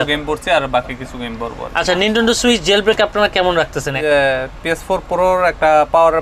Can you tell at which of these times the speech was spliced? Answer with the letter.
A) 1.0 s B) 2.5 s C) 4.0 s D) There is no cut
C